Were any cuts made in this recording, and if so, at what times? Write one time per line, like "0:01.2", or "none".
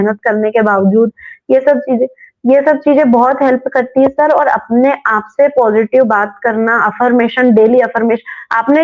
none